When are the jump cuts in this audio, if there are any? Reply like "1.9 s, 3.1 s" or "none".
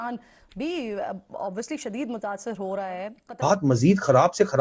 3.4 s